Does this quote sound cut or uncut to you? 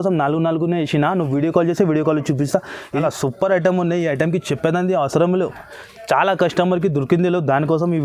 cut